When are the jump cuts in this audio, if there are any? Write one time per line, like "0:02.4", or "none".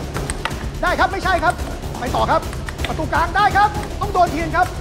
0:03.8